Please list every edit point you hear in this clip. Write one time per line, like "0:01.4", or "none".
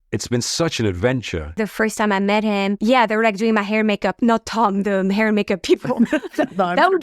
0:01.6
0:02.8